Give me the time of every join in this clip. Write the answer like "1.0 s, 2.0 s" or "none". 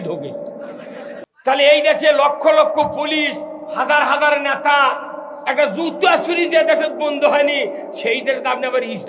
1.2 s

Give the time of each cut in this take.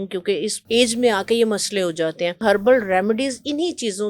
2.4 s

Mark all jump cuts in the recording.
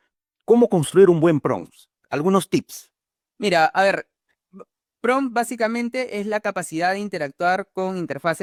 none

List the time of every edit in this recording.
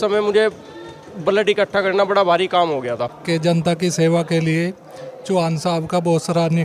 3.1 s

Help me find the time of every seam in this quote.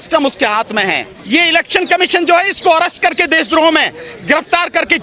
1.1 s

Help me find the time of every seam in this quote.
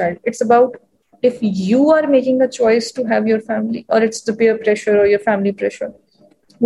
none

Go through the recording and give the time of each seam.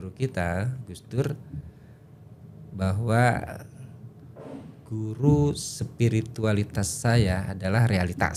none

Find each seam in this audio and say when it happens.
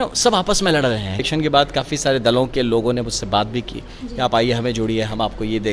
1.2 s

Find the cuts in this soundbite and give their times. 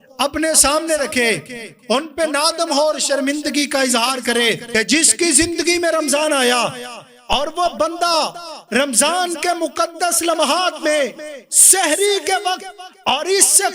4.6 s

